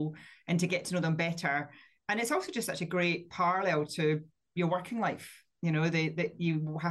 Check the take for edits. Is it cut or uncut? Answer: cut